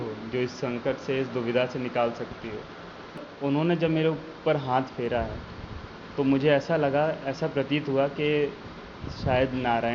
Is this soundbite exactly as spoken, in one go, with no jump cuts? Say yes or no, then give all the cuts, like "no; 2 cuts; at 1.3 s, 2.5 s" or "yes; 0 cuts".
no; 1 cut; at 3.3 s